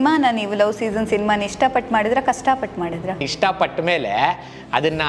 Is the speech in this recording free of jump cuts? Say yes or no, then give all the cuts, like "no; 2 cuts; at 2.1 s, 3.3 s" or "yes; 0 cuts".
no; 1 cut; at 3.3 s